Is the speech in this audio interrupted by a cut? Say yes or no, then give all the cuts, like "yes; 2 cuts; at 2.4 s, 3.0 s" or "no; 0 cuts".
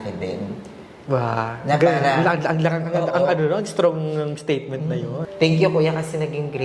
yes; 1 cut; at 5.2 s